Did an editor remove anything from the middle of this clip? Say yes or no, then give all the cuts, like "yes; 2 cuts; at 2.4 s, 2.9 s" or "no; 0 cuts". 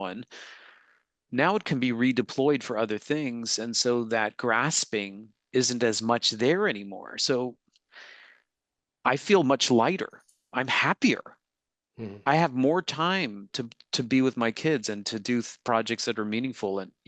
no; 0 cuts